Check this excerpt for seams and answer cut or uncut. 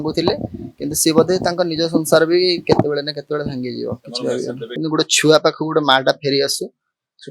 cut